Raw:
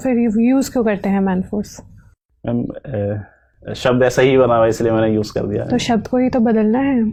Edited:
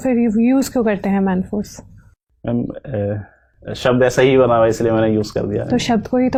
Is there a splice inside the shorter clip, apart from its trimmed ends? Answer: no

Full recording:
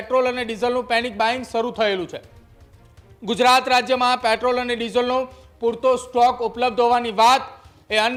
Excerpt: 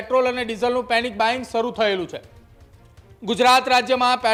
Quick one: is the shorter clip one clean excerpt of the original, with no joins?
yes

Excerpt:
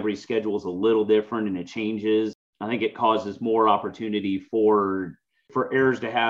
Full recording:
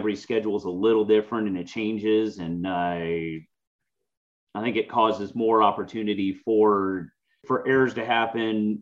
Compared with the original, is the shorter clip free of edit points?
no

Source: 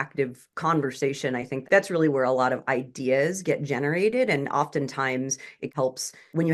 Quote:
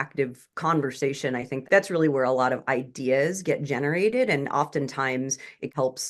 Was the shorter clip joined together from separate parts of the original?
no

